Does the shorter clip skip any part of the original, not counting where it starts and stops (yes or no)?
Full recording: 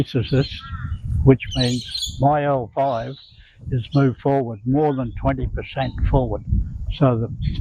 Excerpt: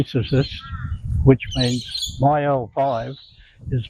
no